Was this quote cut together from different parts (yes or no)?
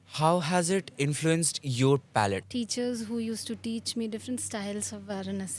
yes